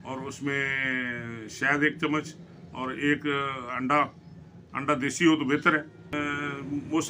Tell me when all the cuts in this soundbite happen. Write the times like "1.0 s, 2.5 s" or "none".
6.2 s

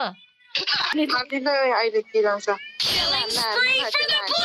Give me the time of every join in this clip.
0.9 s

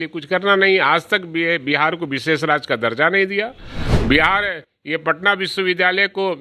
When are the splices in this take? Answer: none

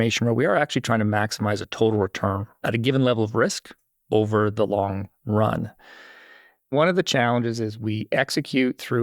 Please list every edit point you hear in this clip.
4.5 s, 6.7 s

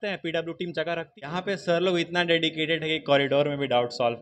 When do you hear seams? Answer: 1.3 s

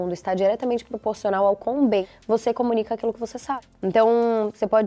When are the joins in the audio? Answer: 2.1 s, 3.6 s

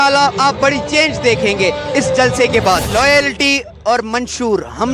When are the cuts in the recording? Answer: 2.8 s

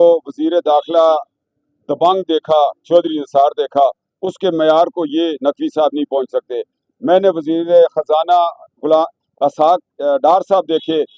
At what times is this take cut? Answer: none

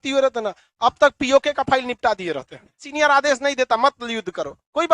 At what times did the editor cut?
2.9 s

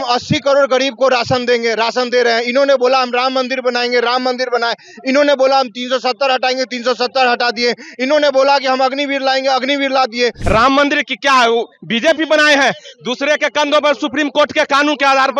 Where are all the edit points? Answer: 10.4 s

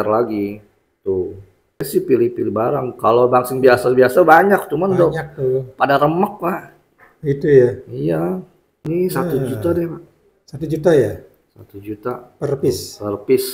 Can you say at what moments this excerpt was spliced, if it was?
1.9 s, 8.8 s

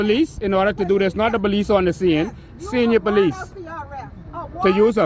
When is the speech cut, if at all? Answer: none

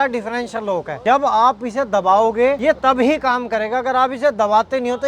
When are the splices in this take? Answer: 1.0 s, 2.8 s

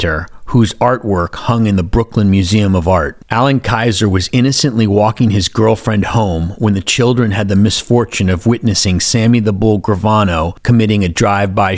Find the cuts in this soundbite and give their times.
10.6 s

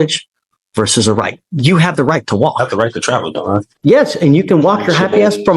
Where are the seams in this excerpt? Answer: 3.7 s

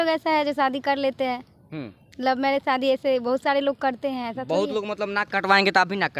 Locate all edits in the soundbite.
none

